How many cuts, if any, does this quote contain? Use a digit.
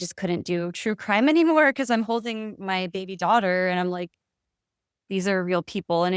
0